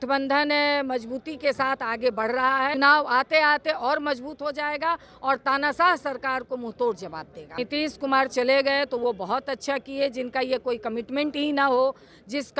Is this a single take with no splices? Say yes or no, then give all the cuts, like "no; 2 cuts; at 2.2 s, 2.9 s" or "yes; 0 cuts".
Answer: no; 2 cuts; at 2.7 s, 7.5 s